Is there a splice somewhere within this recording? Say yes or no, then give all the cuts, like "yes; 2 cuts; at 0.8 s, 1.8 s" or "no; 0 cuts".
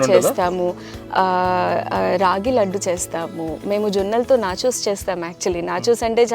no; 0 cuts